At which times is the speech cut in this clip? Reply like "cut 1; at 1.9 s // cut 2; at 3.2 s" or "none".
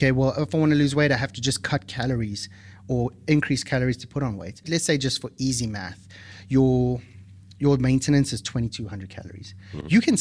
cut 1; at 4.6 s